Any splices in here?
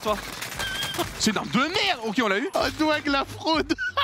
yes; 1 cut; at 2.5 s

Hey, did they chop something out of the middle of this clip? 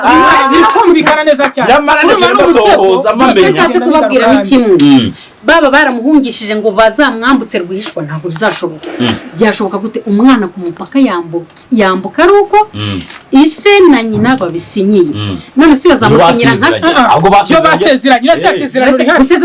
no; 0 cuts

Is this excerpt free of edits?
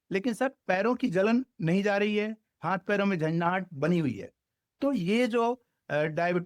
yes; 0 cuts

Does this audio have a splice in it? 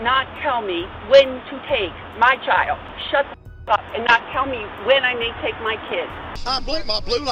yes; 2 cuts; at 2.9 s, 6.3 s

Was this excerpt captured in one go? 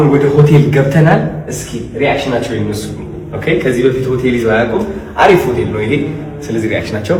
yes; 0 cuts

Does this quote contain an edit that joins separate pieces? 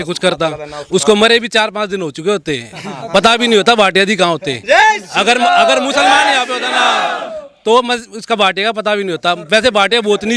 no; 0 cuts

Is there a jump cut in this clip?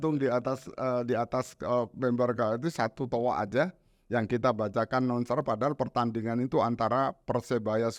no; 0 cuts

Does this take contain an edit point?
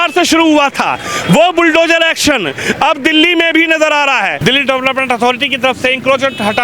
yes; 1 cut; at 4.4 s

